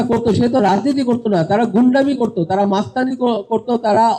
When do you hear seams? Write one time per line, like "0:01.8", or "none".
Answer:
none